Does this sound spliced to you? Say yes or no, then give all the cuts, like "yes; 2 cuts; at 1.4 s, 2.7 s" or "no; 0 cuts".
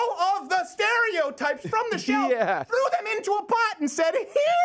no; 0 cuts